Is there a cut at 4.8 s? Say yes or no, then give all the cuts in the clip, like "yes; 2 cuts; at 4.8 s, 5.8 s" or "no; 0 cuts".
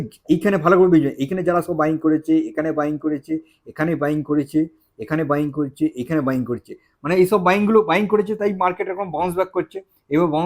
no; 0 cuts